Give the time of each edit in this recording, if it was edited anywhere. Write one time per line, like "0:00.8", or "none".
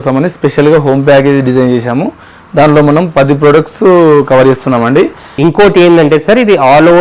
0:05.2